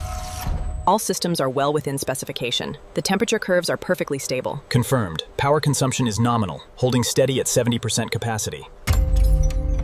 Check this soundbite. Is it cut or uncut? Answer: cut